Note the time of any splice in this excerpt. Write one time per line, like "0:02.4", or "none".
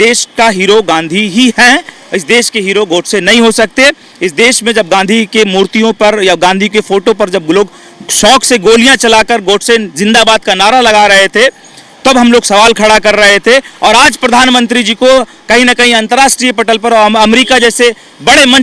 none